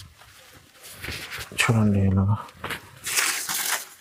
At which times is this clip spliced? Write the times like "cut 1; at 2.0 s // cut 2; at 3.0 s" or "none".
none